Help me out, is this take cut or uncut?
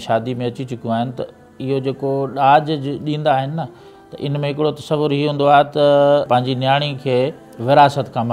cut